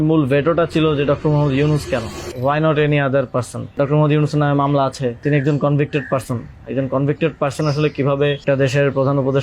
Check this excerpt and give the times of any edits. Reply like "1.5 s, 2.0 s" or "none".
2.2 s, 3.7 s, 5.2 s, 8.4 s